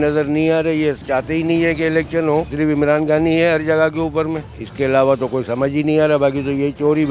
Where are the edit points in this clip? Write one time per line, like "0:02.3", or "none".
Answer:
0:01.0
0:02.5
0:04.6